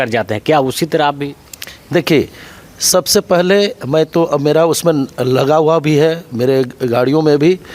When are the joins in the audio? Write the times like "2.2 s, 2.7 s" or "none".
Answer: none